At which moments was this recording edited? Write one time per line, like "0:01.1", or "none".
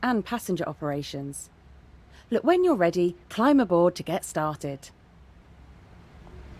0:04.9